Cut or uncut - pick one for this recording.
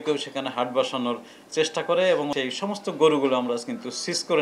cut